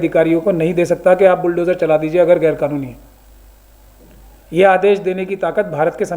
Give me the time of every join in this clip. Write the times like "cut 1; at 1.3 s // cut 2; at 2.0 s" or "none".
none